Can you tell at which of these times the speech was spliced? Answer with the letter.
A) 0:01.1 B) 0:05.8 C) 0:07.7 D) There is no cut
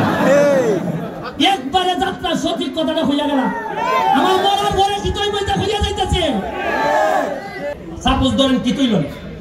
C